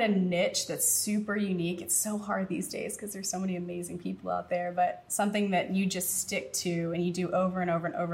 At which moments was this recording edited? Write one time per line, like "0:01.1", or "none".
none